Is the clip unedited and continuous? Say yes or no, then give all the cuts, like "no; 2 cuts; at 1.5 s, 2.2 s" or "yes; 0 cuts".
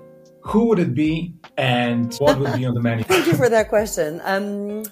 no; 2 cuts; at 2.1 s, 3.0 s